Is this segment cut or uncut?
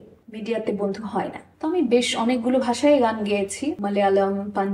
cut